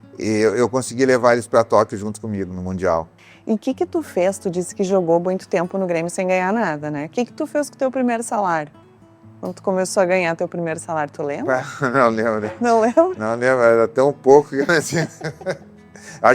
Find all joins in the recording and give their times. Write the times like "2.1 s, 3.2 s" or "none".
3.2 s

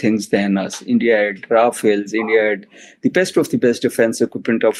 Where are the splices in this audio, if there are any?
none

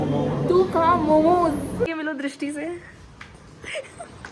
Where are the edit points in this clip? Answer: 1.9 s

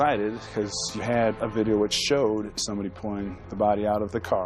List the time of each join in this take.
2.5 s

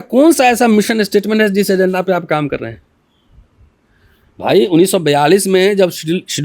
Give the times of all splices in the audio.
none

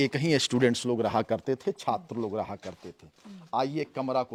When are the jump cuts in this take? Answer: none

